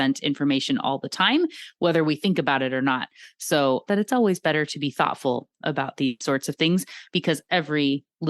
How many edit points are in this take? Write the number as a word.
one